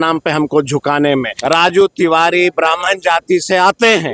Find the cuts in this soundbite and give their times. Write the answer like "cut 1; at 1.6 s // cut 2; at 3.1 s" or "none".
cut 1; at 1.3 s